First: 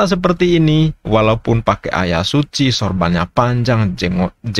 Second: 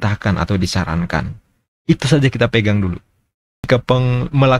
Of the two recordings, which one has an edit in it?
second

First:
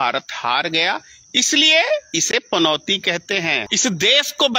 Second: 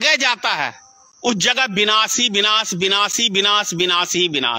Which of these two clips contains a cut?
first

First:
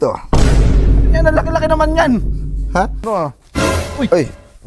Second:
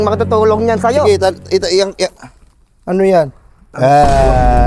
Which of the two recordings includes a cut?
first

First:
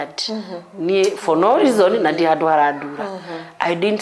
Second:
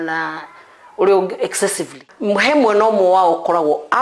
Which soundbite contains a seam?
second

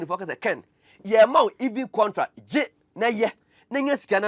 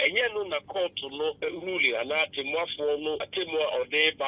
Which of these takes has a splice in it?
second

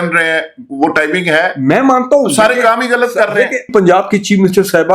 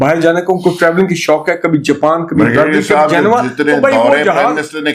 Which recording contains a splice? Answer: first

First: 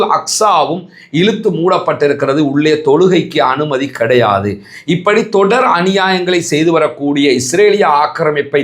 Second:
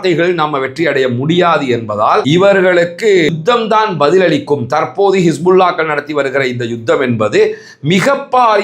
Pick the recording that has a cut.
second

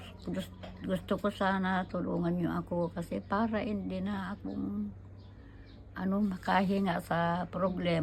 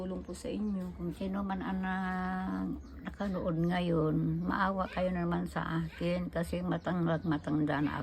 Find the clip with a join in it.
second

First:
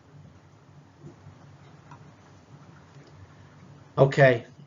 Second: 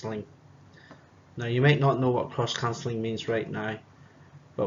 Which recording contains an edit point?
first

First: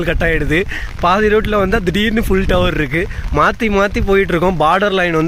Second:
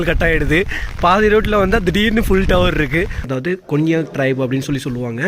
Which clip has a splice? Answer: second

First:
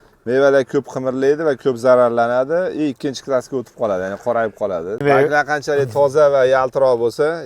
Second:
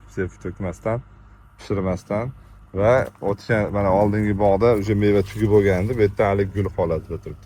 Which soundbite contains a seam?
first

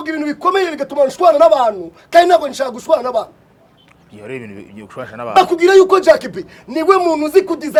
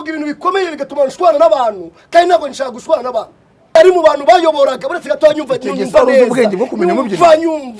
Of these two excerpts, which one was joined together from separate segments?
second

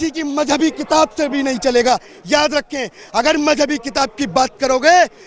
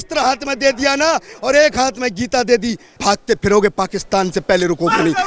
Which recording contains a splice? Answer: second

